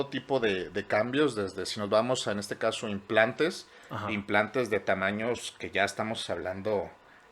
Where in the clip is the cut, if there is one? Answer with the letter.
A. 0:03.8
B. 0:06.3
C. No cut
C